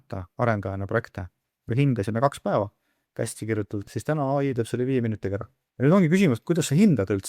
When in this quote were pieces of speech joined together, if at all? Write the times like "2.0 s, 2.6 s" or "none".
1.7 s, 5.6 s